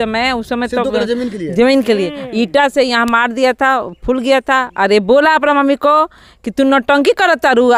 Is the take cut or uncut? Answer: uncut